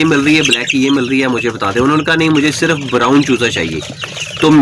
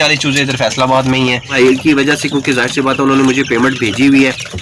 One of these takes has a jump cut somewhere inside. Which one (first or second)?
second